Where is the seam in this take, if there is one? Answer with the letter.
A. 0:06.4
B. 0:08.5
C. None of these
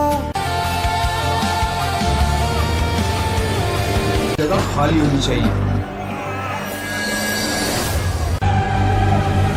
C